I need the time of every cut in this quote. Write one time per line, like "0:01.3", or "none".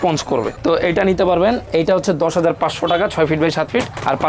none

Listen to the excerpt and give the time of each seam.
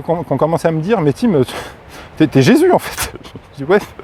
none

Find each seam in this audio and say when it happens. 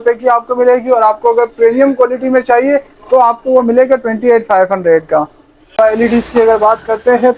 0:05.8

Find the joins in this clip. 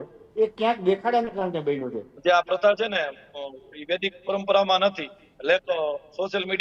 0:02.1

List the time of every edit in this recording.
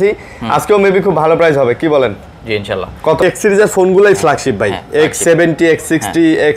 0:03.2

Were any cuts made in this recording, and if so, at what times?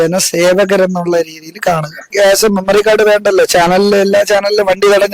0:02.1

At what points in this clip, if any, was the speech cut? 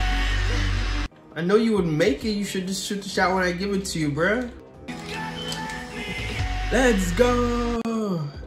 0:04.7

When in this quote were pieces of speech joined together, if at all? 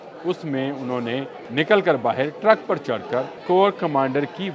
0:01.4
0:03.3

